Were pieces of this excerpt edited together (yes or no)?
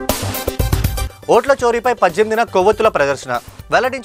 no